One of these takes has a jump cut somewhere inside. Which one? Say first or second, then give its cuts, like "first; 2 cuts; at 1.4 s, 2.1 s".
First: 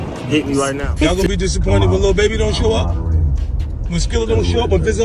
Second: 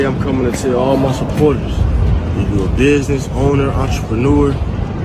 first; 1 cut; at 1.1 s